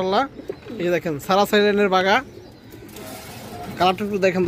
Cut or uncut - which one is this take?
uncut